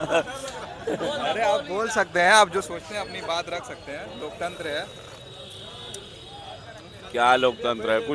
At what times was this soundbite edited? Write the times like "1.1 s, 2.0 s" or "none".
none